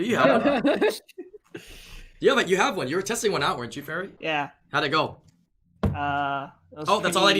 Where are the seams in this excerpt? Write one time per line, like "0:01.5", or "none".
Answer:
0:04.1